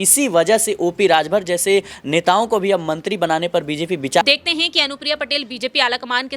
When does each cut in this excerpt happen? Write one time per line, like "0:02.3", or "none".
0:04.2